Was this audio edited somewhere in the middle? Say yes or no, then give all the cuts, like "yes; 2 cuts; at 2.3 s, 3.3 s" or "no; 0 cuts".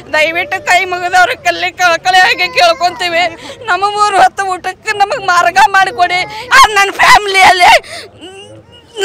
yes; 1 cut; at 6.4 s